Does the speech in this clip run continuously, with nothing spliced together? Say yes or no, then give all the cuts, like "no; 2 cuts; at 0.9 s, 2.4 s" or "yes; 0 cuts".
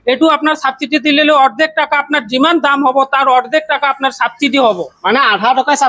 yes; 0 cuts